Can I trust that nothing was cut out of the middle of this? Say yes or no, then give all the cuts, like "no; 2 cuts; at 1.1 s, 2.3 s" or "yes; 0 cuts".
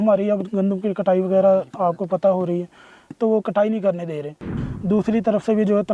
no; 1 cut; at 4.5 s